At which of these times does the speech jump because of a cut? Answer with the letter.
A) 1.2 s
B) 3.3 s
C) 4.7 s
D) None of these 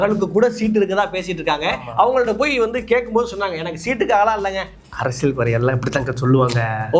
C